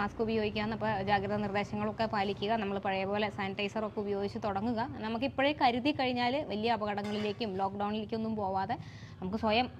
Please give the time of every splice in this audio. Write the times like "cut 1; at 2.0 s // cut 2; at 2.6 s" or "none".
none